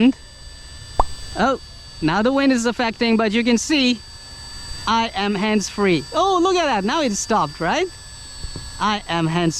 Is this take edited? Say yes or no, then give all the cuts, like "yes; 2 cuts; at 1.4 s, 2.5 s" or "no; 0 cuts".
no; 0 cuts